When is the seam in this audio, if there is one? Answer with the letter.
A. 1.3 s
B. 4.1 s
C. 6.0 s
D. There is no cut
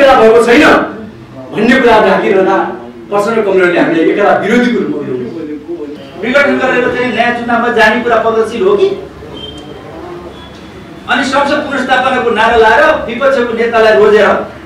C